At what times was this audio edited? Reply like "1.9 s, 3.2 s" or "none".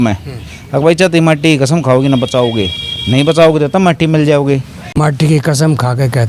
5.0 s